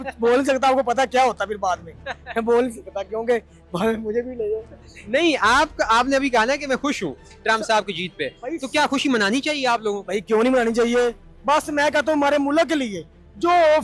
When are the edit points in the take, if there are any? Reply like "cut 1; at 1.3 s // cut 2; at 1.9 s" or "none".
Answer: none